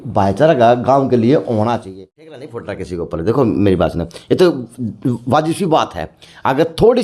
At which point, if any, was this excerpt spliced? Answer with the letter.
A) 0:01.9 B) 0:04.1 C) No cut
A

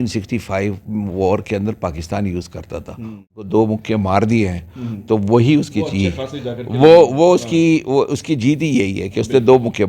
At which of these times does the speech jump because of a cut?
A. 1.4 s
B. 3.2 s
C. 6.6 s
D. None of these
B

